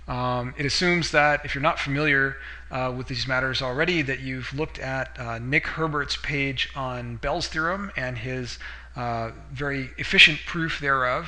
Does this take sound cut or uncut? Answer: cut